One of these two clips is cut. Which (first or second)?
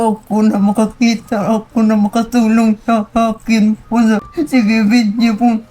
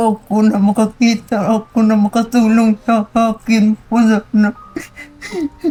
first